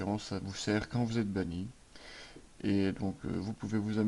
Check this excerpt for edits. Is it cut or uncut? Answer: uncut